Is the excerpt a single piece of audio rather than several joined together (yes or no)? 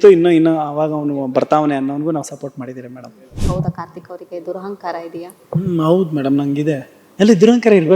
no